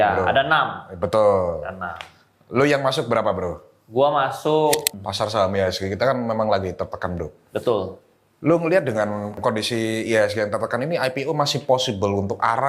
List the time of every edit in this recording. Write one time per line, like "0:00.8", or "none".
0:04.9
0:09.4